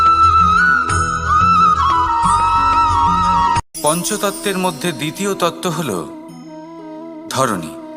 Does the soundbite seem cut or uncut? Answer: cut